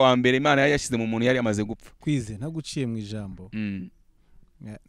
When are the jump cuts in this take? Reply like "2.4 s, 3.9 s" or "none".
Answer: 1.9 s